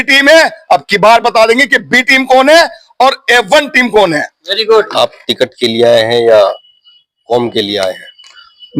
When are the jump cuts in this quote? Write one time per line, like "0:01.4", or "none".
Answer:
0:04.9